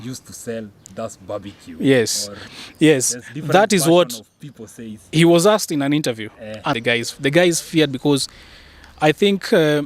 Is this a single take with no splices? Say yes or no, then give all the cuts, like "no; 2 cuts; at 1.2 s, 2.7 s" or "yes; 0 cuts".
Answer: no; 1 cut; at 6.8 s